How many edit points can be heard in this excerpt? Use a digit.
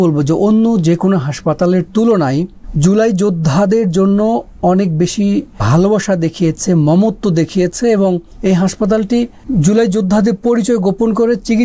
4